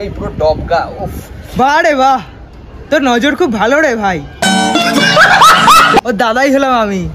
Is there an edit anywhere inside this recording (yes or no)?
no